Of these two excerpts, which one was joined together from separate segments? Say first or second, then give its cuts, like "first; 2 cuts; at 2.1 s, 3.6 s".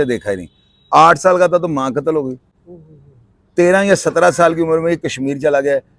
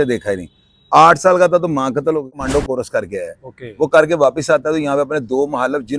second; 1 cut; at 2.4 s